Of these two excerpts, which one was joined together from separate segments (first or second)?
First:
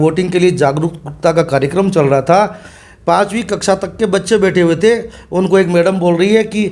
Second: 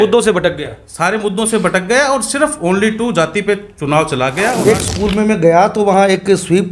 second